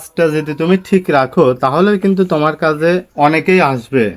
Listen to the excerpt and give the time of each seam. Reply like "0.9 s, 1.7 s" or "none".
3.1 s